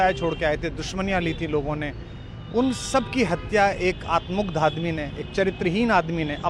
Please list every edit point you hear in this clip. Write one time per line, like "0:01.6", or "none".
none